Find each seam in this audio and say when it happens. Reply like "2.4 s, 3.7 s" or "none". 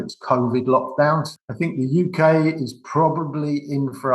1.3 s